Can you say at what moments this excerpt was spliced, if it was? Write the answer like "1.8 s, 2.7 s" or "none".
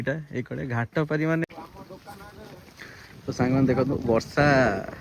1.4 s